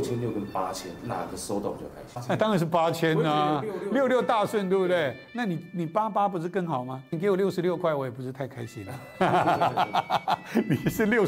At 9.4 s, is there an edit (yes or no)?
no